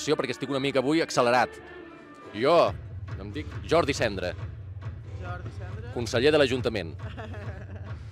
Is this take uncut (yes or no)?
yes